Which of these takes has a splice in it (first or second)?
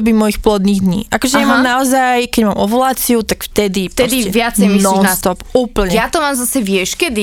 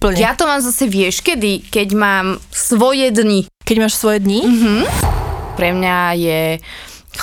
second